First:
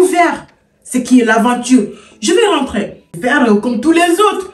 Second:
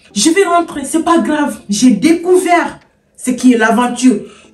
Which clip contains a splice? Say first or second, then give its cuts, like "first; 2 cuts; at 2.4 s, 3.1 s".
first; 1 cut; at 3.2 s